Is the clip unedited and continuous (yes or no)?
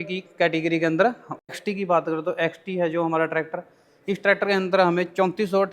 no